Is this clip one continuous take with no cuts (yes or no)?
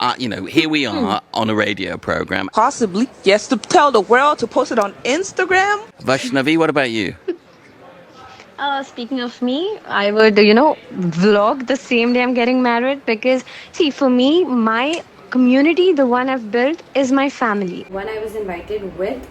no